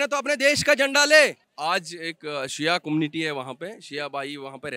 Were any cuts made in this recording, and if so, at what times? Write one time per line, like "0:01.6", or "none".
0:01.5